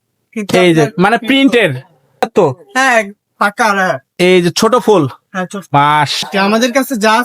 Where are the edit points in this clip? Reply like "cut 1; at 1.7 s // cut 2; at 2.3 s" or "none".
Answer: cut 1; at 2.3 s // cut 2; at 6.2 s